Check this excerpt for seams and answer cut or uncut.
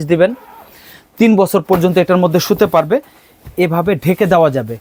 uncut